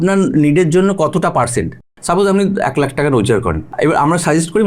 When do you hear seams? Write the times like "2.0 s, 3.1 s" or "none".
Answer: 1.9 s, 3.6 s